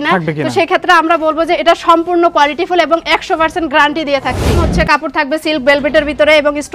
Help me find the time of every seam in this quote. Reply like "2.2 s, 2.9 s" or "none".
4.6 s